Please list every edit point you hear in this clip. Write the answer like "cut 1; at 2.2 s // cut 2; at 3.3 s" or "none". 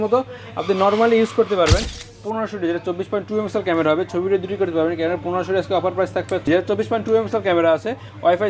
cut 1; at 1.9 s // cut 2; at 6.5 s